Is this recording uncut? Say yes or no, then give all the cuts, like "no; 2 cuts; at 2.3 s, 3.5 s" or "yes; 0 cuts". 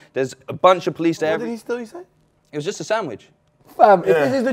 no; 1 cut; at 3.6 s